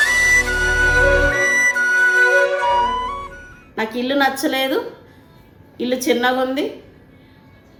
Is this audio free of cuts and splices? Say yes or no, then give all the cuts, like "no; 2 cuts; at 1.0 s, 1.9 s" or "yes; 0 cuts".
yes; 0 cuts